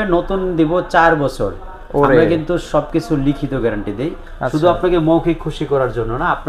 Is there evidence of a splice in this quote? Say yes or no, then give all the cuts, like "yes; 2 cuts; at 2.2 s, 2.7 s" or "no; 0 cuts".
no; 0 cuts